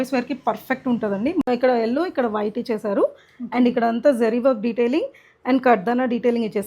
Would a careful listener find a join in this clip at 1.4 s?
yes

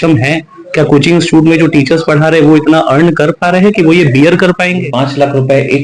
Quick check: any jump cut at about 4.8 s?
yes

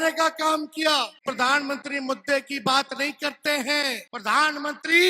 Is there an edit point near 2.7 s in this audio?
no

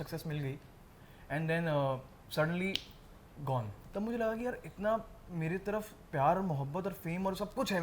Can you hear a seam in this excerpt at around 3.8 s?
yes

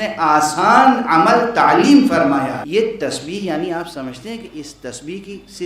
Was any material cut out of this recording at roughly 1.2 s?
no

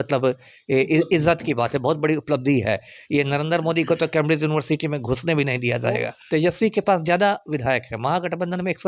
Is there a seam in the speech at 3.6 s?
no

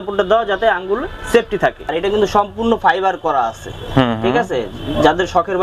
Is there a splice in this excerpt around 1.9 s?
yes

